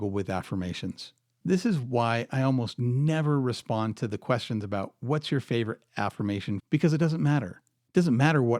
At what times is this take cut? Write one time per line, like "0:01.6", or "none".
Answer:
0:04.6
0:06.6